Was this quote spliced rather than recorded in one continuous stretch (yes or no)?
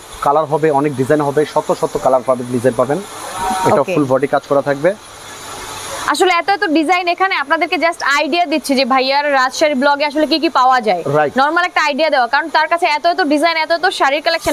no